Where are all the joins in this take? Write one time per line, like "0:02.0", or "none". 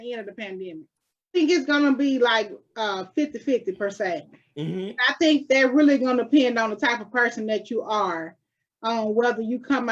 0:01.4